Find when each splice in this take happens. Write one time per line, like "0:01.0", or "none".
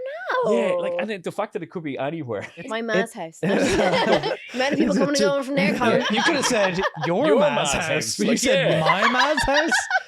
0:02.7
0:04.2
0:06.1